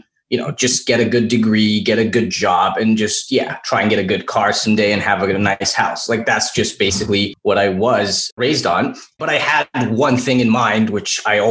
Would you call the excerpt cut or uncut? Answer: cut